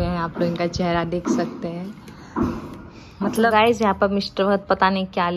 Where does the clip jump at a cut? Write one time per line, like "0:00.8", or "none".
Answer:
0:03.3